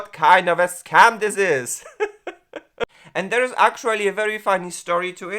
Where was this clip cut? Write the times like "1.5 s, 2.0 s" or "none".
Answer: 3.0 s